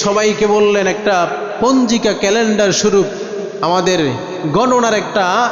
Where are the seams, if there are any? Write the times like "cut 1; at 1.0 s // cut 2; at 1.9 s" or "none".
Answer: none